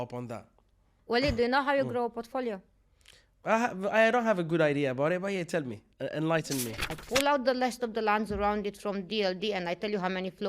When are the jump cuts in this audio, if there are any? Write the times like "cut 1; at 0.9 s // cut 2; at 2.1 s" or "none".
cut 1; at 0.9 s // cut 2; at 6.7 s